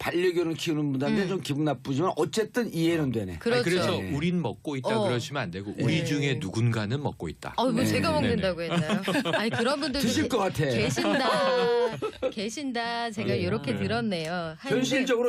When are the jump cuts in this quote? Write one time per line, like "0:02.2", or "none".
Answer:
0:06.7